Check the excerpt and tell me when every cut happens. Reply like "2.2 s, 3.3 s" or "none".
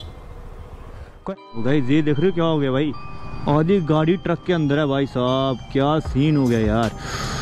1.2 s